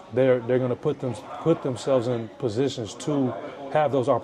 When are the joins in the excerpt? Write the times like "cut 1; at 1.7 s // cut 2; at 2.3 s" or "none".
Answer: none